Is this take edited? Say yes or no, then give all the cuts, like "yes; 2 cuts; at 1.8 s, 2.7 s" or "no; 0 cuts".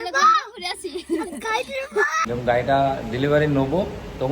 yes; 1 cut; at 2.2 s